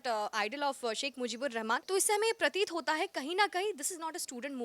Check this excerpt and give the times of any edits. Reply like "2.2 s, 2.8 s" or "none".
1.8 s